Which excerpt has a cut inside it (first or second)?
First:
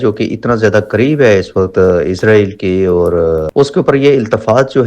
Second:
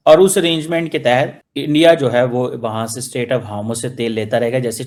first